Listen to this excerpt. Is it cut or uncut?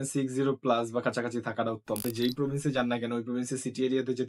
cut